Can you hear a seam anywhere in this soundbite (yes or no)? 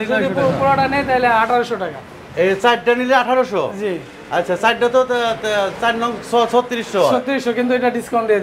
no